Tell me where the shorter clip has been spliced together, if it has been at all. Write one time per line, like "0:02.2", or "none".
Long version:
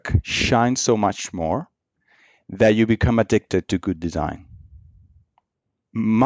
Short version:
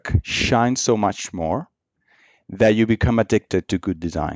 none